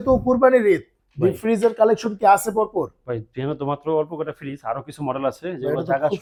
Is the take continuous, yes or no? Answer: yes